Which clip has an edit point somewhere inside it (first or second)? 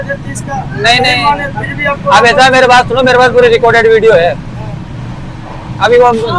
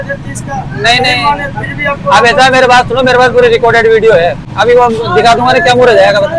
second